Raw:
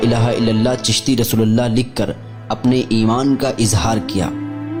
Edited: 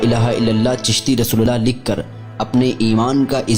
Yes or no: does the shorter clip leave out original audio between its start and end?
yes